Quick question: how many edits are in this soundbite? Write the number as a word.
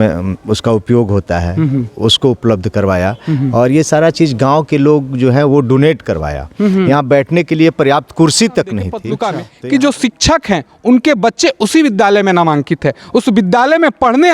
one